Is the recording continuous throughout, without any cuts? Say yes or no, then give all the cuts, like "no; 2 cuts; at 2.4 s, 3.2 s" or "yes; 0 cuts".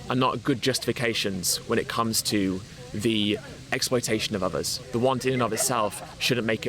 no; 1 cut; at 4.8 s